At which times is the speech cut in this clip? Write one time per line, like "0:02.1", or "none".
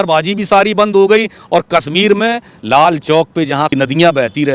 none